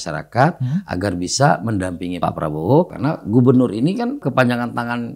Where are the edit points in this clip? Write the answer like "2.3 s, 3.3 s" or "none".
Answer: 2.1 s, 2.9 s, 4.2 s